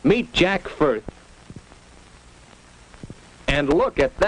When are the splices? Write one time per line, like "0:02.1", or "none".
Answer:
none

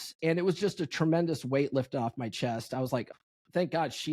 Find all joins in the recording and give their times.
0:03.1

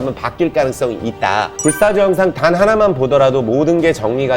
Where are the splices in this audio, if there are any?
0:01.5

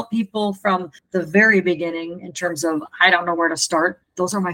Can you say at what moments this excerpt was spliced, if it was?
0:01.0

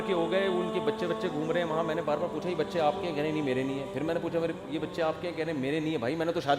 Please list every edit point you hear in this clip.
none

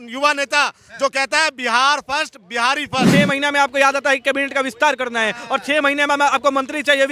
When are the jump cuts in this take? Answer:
0:03.1

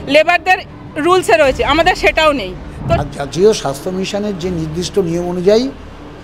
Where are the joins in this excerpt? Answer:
0:03.0

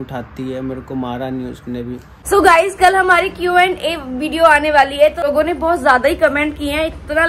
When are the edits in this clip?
0:02.1
0:05.2

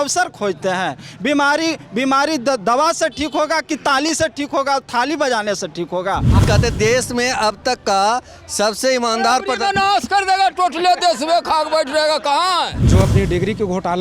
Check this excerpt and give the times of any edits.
0:06.4
0:12.8

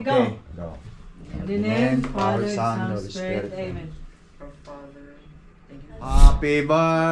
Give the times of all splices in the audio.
0:06.1

